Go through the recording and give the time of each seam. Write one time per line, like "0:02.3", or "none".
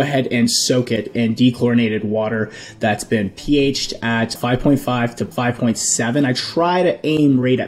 0:04.4
0:05.3